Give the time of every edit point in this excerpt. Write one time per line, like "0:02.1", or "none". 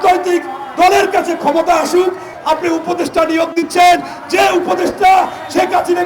0:02.3

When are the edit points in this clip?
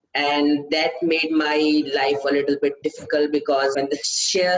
0:02.8
0:03.7

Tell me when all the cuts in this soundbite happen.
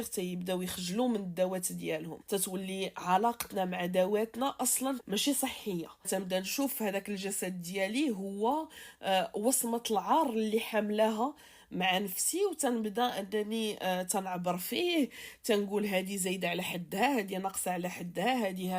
0:02.1
0:05.0
0:06.1

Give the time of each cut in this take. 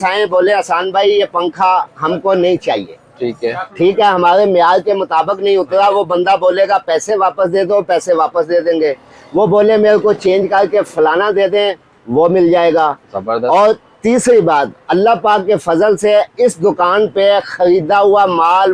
none

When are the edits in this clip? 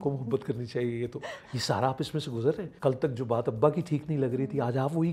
0:02.7

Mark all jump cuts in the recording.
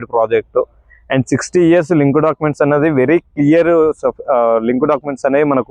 none

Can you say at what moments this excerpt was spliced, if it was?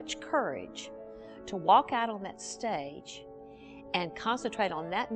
none

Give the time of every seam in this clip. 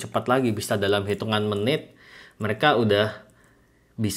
none

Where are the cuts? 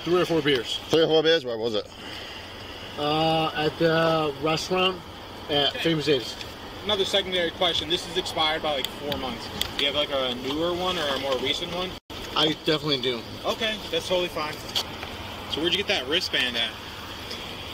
none

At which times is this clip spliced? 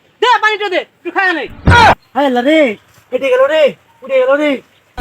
0:02.0

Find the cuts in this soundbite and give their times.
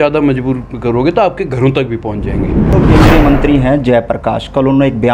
0:02.8

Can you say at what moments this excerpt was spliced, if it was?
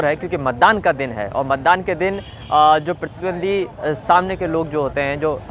none

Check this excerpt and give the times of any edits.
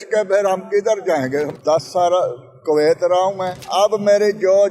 0:01.5
0:03.6

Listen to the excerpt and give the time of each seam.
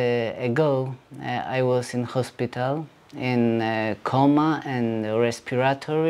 none

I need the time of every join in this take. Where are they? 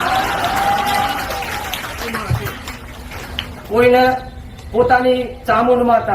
0:03.4

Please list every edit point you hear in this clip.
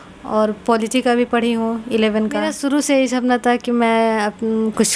0:02.5

